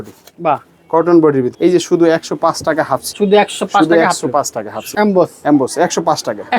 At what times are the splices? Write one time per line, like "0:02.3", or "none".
0:01.5
0:03.1
0:04.8